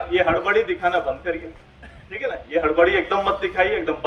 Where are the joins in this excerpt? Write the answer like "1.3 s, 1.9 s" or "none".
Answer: none